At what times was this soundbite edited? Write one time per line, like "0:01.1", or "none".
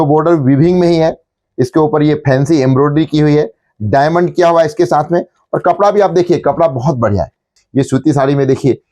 0:07.5